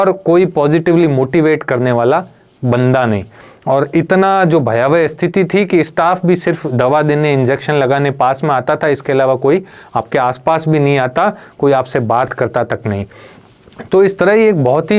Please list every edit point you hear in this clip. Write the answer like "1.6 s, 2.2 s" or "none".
none